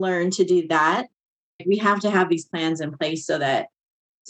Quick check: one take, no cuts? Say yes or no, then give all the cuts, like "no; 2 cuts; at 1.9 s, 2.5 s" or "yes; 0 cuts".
no; 1 cut; at 1.6 s